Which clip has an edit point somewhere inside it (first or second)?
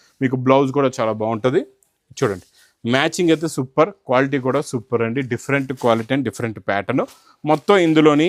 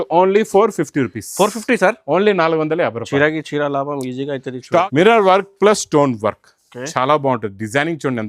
second